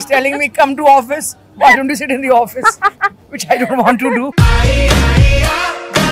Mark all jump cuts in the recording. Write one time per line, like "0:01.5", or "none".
none